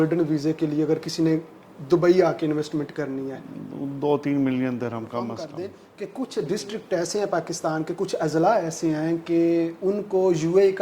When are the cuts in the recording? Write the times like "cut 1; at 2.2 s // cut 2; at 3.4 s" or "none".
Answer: cut 1; at 5.4 s